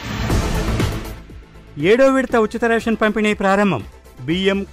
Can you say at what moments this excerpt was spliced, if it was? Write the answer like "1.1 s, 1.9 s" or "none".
1.0 s